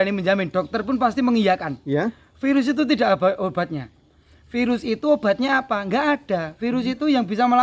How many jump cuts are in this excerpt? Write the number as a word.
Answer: zero